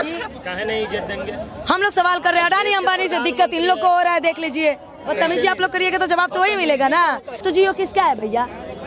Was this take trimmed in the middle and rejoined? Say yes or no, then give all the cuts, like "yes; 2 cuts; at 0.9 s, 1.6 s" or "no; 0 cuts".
yes; 2 cuts; at 5.1 s, 7.3 s